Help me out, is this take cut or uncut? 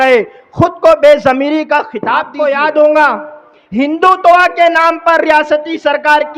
cut